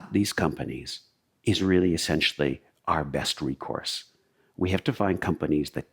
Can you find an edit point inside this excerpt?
no; 0 cuts

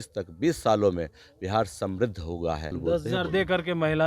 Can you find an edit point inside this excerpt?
yes; 1 cut; at 2.8 s

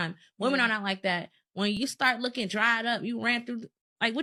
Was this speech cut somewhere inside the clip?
no; 0 cuts

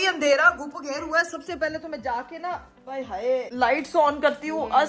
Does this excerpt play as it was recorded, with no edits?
yes; 0 cuts

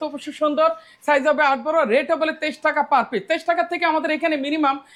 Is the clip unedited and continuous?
yes; 0 cuts

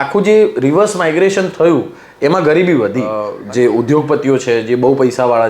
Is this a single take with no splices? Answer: no; 1 cut; at 3.3 s

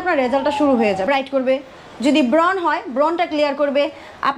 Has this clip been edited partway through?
yes; 1 cut; at 1.1 s

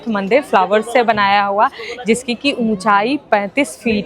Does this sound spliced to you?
no; 0 cuts

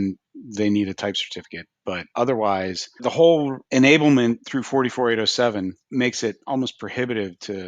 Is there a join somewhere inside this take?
yes; 5 cuts; at 2.0 s, 3.0 s, 3.6 s, 4.5 s, 5.8 s

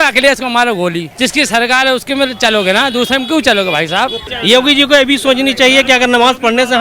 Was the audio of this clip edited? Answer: yes; 2 cuts; at 1.1 s, 4.3 s

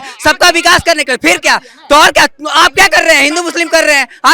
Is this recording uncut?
yes; 0 cuts

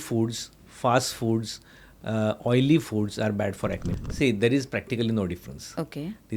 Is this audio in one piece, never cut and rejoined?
no; 1 cut; at 3.8 s

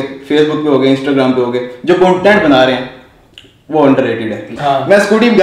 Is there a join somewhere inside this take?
yes; 1 cut; at 4.5 s

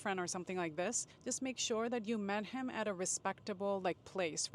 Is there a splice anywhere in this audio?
yes; 1 cut; at 1.1 s

